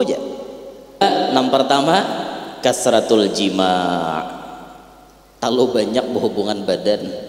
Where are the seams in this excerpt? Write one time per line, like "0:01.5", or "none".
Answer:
0:01.0